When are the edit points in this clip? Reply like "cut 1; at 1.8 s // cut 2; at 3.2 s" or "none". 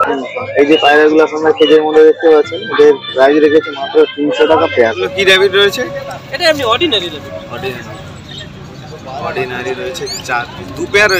cut 1; at 5.1 s

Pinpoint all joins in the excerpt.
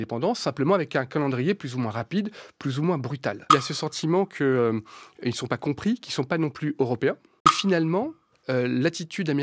cut 1; at 3.5 s // cut 2; at 7.5 s

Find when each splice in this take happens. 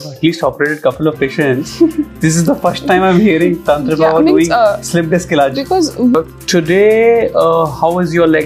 cut 1; at 6.1 s

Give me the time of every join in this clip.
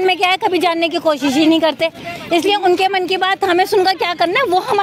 none

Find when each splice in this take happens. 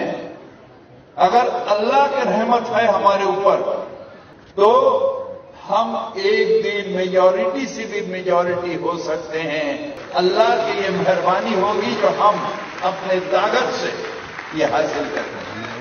none

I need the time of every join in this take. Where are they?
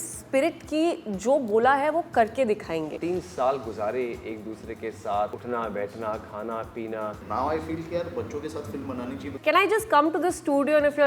cut 1; at 2.9 s // cut 2; at 7.2 s // cut 3; at 9.3 s

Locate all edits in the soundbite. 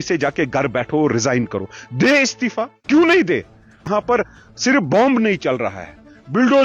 cut 1; at 3.8 s

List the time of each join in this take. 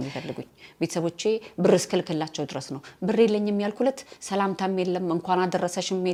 none

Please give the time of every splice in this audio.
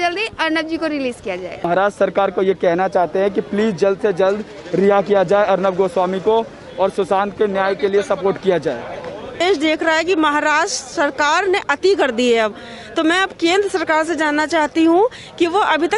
cut 1; at 1.6 s // cut 2; at 9.4 s

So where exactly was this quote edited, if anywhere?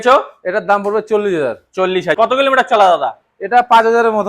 cut 1; at 2.2 s

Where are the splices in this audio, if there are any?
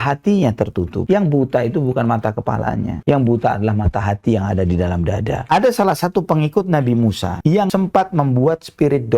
cut 1; at 1.0 s // cut 2; at 5.4 s

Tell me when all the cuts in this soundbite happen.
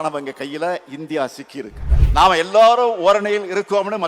cut 1; at 1.9 s

